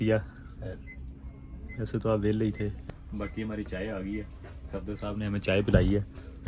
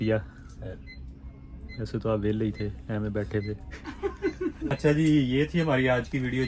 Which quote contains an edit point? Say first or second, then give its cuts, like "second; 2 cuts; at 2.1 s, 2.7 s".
first; 1 cut; at 2.8 s